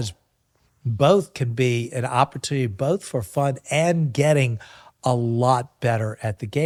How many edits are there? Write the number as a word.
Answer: zero